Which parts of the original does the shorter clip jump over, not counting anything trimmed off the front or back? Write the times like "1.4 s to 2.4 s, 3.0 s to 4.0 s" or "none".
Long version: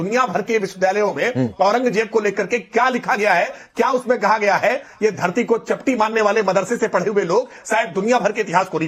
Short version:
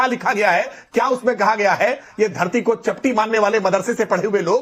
none

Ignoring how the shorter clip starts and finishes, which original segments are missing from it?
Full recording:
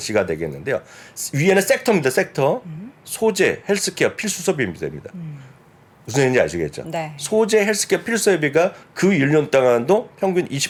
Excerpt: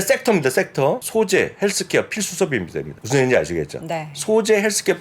2.6 s to 3.1 s, 5.0 s to 6.0 s

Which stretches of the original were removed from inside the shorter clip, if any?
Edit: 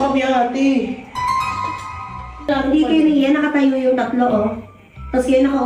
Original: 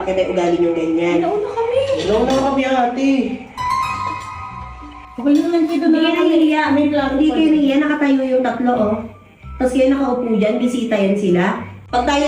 4.9 s to 6.9 s

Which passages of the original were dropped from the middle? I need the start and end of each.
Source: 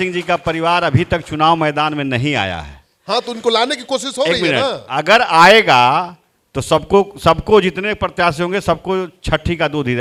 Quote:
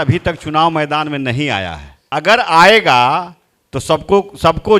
2.9 s to 4.8 s

